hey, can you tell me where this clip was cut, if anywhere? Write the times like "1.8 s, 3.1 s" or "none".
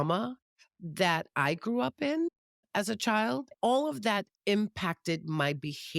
3.5 s